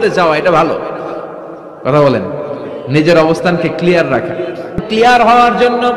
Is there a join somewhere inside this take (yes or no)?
yes